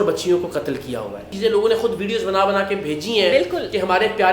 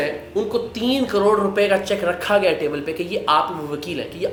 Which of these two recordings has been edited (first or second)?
first